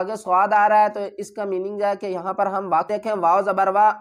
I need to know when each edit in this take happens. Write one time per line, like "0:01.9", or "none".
0:02.9